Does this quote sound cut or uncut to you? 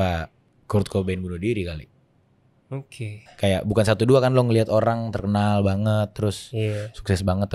cut